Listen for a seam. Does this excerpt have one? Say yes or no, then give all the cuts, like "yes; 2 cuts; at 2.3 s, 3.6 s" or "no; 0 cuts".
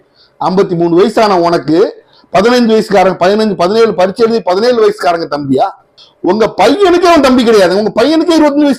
no; 0 cuts